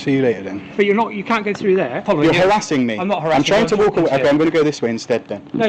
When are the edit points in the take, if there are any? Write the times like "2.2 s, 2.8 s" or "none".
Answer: 2.0 s